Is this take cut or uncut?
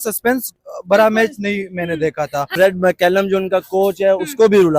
cut